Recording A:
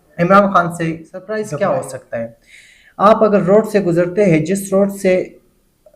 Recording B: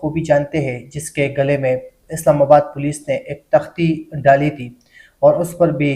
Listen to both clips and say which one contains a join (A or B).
A